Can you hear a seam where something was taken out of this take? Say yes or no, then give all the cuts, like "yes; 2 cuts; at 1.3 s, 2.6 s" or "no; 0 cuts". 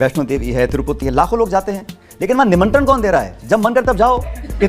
no; 0 cuts